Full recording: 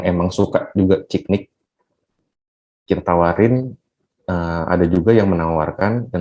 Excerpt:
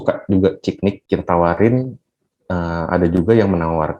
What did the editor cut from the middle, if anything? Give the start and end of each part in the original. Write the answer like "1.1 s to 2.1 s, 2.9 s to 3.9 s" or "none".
1.5 s to 2.8 s